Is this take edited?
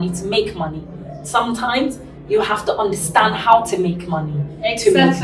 no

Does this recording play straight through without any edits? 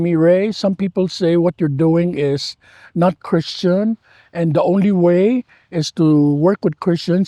yes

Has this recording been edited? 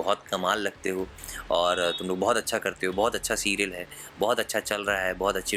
no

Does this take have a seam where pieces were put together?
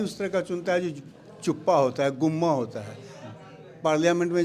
no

